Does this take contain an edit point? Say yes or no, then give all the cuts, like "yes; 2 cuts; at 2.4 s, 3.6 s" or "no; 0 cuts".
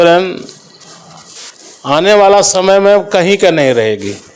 no; 0 cuts